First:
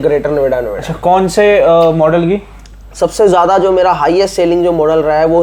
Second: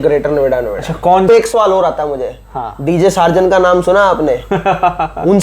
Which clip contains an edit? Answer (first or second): second